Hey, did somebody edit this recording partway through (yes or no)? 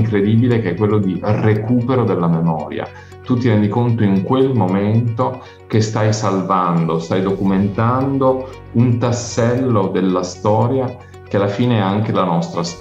no